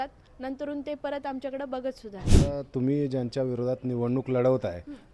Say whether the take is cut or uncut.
cut